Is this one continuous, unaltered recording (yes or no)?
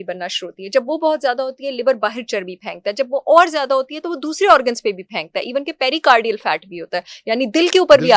yes